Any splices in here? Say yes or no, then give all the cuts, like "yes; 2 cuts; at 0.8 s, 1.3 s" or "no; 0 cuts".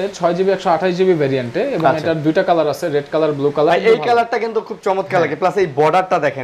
yes; 1 cut; at 3.7 s